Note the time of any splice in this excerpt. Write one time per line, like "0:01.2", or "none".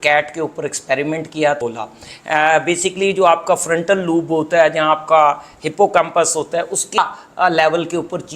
0:01.6
0:07.0